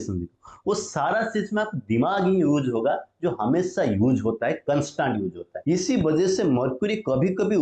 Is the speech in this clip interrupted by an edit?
yes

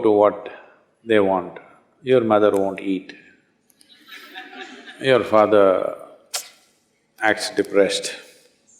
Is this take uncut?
yes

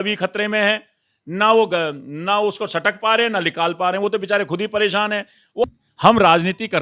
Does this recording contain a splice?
yes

